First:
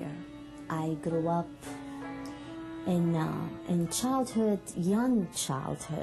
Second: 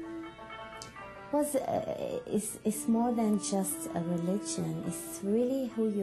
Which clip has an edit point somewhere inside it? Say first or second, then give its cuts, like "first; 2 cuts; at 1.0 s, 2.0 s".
first; 1 cut; at 1.9 s